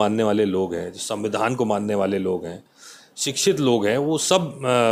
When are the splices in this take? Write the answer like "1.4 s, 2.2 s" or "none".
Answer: none